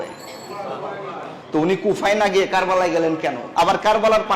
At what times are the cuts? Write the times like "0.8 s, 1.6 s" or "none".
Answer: 3.4 s